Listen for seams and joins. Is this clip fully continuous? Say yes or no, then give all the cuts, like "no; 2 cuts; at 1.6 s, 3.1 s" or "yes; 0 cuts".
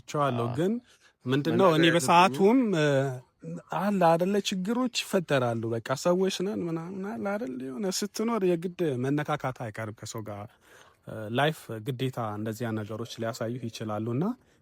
yes; 0 cuts